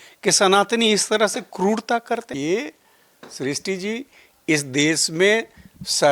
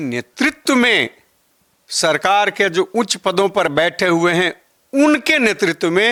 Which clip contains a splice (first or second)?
first